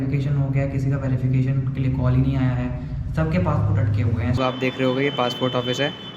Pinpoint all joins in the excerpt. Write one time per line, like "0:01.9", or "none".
0:04.4